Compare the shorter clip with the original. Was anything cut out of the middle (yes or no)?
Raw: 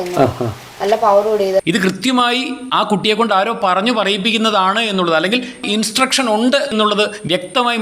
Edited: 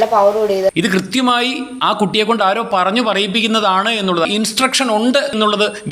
yes